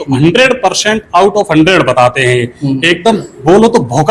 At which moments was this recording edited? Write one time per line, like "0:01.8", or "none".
none